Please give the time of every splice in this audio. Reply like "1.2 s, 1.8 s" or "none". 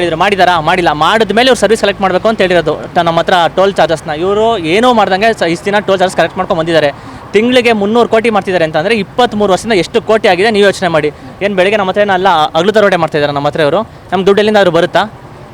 none

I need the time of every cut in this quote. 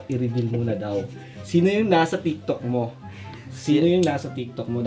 none

